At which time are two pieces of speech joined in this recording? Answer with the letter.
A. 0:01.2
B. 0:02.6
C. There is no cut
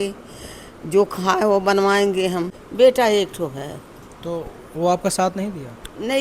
B